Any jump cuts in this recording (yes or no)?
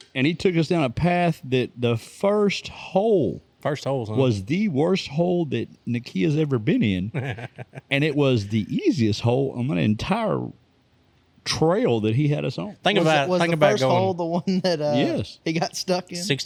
no